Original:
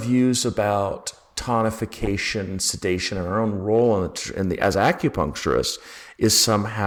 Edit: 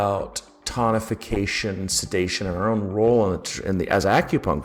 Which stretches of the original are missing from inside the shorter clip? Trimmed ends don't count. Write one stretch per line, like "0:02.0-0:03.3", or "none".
none

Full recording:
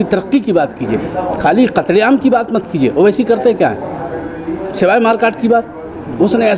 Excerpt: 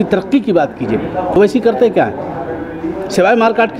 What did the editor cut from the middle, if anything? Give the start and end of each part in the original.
0:01.3-0:03.0

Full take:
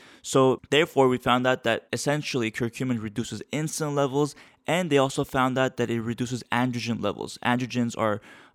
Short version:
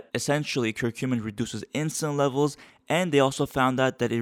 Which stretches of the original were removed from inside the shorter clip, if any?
none

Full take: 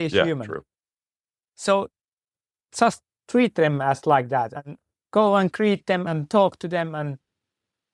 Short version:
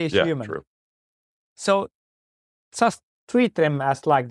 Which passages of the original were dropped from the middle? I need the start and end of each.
none

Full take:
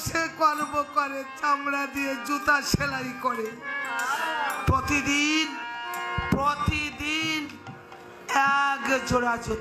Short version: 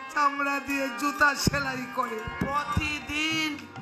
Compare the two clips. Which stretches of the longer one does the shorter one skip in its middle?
0:03.5-0:06.2

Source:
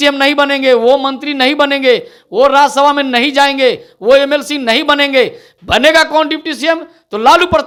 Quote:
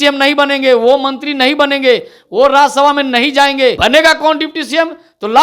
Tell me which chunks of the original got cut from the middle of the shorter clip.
0:03.8-0:05.7

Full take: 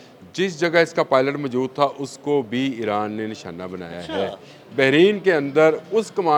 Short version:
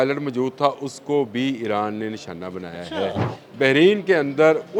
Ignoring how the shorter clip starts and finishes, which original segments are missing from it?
none

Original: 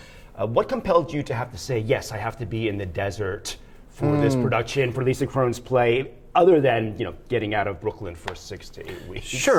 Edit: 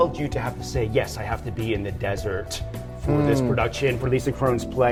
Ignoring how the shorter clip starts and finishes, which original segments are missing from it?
none

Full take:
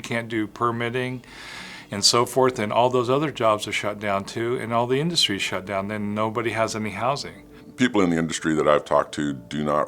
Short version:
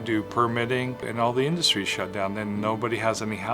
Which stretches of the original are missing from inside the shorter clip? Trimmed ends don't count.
0:01.3-0:04.6

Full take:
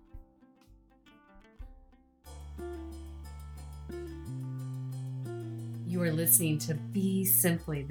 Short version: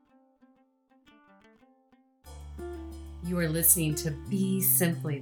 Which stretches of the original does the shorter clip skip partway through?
0:03.2-0:05.8

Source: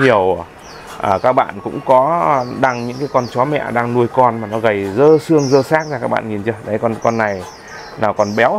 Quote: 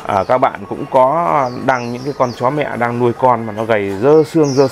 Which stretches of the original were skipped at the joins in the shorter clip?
none

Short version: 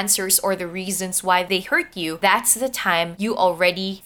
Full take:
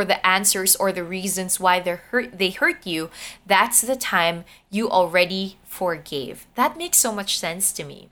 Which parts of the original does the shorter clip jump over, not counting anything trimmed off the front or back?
0:02.0-0:02.9
0:04.4-0:04.7

